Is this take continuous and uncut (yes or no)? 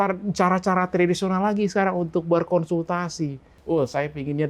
no